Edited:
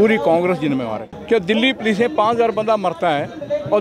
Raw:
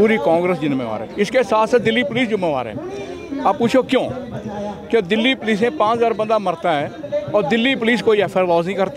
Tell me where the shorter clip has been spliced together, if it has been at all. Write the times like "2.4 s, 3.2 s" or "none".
1.1 s